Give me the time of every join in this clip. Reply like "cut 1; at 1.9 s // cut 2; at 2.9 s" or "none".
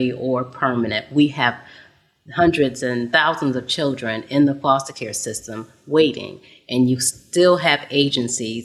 none